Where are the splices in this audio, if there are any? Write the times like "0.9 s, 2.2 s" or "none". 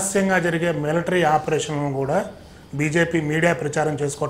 none